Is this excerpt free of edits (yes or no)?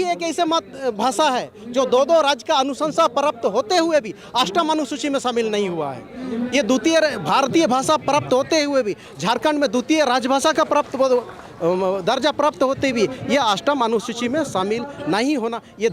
yes